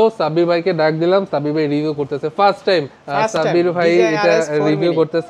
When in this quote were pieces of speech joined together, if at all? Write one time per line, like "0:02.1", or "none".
0:03.0